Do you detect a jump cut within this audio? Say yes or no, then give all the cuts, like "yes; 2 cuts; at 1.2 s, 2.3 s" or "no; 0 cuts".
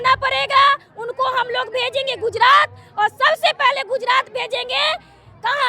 no; 0 cuts